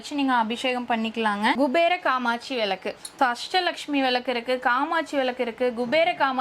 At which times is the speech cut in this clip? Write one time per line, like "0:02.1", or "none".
0:01.6
0:03.1